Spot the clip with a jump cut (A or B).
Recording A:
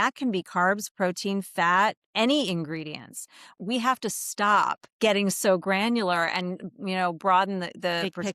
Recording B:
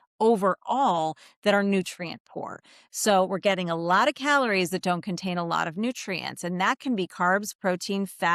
A